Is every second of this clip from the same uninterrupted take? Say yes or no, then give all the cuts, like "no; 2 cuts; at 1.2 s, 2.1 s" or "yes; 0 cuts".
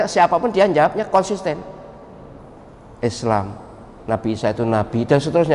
yes; 0 cuts